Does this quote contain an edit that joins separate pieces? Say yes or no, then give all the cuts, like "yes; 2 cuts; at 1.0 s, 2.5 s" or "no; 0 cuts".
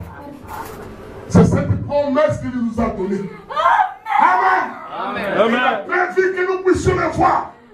no; 0 cuts